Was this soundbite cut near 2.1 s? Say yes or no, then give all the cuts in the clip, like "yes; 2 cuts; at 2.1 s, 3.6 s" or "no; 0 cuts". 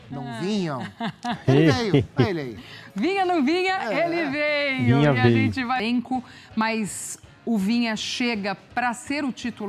no; 1 cut; at 5.8 s